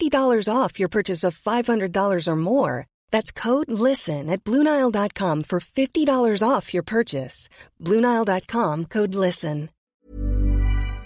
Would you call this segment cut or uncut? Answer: cut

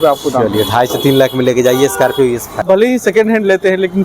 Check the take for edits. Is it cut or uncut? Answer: cut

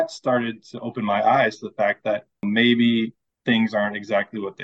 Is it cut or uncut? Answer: cut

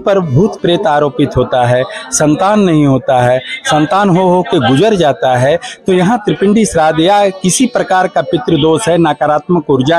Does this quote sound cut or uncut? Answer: uncut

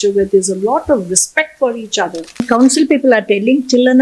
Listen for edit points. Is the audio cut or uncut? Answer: cut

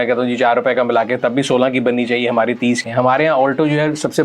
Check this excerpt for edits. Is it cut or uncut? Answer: cut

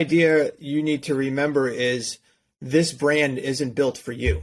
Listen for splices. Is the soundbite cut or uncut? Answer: uncut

